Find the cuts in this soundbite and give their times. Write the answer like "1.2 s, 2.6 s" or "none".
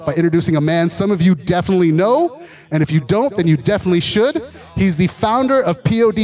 none